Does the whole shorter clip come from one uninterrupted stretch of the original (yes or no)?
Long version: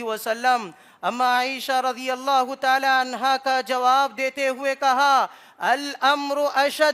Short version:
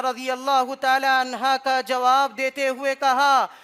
yes